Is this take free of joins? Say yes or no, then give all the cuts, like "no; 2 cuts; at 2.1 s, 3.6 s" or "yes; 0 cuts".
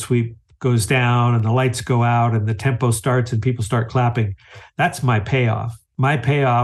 yes; 0 cuts